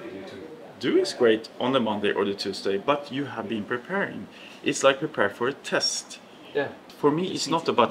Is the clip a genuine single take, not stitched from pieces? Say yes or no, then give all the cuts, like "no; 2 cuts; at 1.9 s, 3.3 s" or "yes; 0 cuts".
no; 1 cut; at 6.9 s